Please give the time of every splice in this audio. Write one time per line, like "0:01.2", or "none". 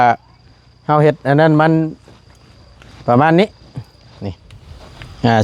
none